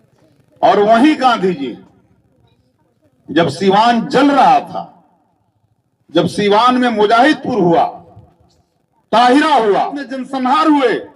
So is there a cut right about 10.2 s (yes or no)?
yes